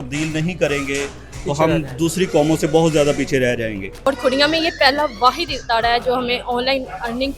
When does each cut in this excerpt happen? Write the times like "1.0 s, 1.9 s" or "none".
4.1 s